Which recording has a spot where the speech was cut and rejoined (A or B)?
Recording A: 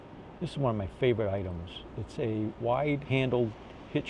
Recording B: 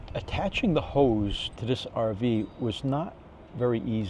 B